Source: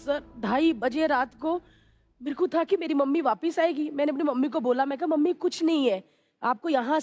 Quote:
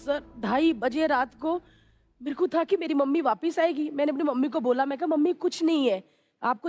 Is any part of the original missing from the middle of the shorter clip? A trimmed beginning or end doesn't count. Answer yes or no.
no